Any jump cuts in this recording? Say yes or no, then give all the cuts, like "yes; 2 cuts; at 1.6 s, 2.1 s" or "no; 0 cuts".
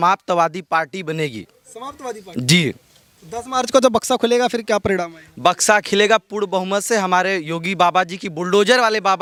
no; 0 cuts